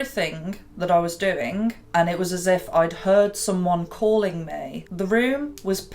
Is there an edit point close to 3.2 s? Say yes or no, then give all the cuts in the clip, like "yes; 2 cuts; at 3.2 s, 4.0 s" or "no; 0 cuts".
no; 2 cuts; at 1.8 s, 4.7 s